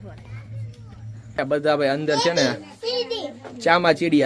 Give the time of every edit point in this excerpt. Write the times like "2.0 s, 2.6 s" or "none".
1.4 s

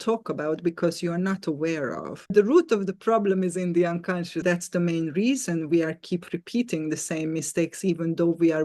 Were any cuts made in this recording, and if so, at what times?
2.3 s, 4.4 s

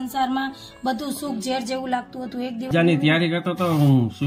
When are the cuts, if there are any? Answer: 2.7 s

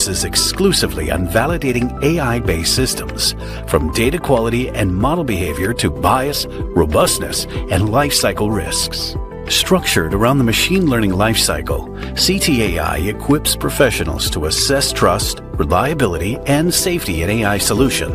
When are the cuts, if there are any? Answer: none

